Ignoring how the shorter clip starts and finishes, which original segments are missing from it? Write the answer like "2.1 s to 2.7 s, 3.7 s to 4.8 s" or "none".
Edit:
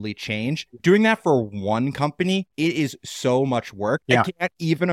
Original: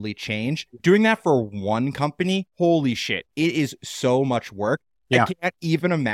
2.5 s to 3.3 s, 4.8 s to 5.0 s